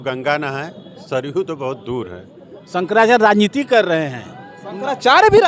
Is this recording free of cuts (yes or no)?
no